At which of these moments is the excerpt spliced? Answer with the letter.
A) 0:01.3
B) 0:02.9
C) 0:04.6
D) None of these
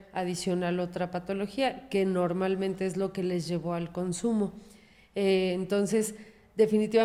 D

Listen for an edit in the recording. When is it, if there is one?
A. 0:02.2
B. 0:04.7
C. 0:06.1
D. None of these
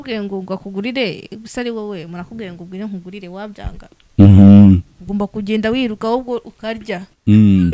D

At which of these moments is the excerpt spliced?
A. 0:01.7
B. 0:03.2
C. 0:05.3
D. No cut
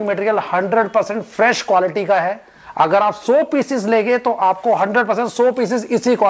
D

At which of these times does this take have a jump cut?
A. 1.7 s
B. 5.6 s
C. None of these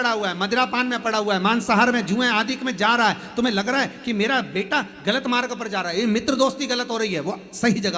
B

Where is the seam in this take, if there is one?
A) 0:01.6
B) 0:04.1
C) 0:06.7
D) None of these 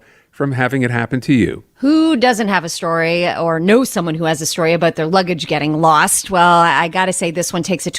A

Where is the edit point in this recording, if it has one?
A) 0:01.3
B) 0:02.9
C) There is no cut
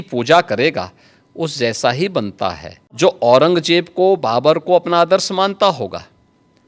B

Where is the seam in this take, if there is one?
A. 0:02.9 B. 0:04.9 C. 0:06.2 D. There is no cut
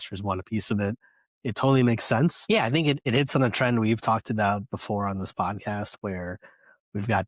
A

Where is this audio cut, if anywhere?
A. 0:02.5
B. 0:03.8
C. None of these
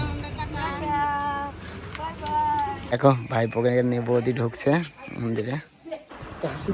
C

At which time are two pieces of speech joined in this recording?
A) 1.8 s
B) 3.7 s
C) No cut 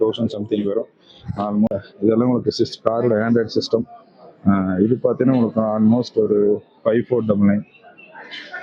A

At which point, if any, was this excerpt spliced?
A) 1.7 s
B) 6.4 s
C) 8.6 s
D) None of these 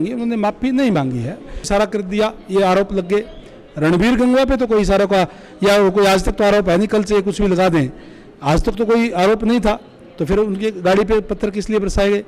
A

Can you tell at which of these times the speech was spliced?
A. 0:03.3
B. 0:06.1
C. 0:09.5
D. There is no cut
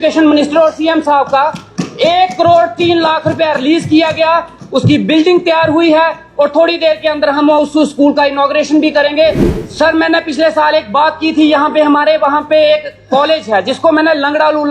C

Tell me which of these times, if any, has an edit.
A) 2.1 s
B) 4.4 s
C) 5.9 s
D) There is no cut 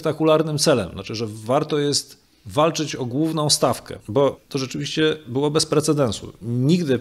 B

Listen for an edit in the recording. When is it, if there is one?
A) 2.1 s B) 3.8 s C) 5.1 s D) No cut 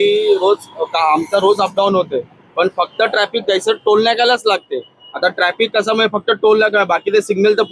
D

